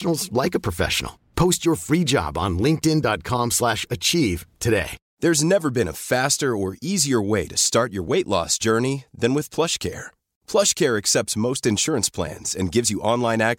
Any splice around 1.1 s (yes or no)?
no